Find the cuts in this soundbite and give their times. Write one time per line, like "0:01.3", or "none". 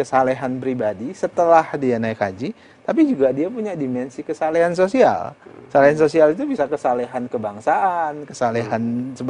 none